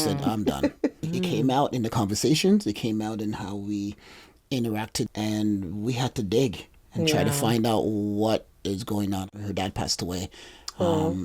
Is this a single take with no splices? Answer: no; 3 cuts; at 1.0 s, 5.1 s, 9.3 s

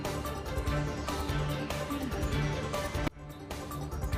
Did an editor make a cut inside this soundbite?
no; 0 cuts

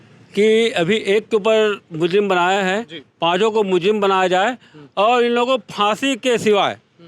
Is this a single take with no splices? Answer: yes; 0 cuts

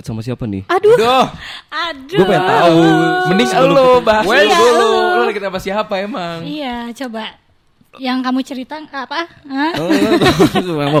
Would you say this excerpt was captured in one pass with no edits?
yes; 0 cuts

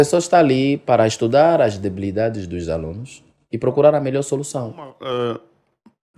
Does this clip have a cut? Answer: yes; 1 cut; at 5.0 s

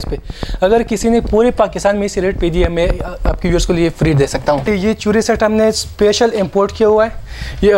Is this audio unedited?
no; 1 cut; at 4.7 s

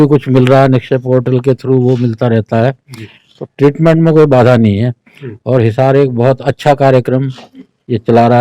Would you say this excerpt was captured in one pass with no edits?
yes; 0 cuts

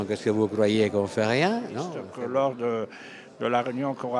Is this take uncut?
no; 1 cut; at 2.0 s

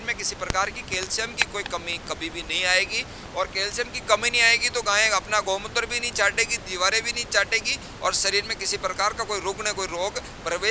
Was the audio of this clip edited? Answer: no; 0 cuts

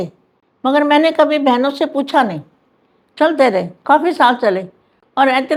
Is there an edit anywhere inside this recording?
no; 0 cuts

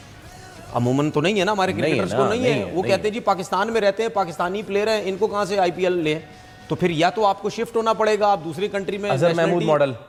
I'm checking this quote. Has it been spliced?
no; 0 cuts

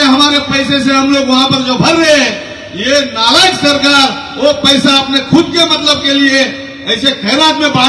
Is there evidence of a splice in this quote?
no; 0 cuts

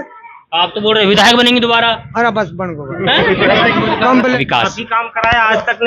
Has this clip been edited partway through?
yes; 1 cut; at 4.4 s

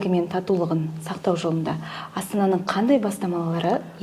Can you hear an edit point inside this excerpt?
no; 0 cuts

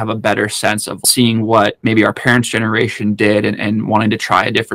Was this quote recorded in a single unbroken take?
no; 2 cuts; at 1.0 s, 1.8 s

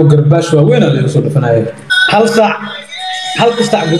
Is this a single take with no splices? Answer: no; 1 cut; at 1.8 s

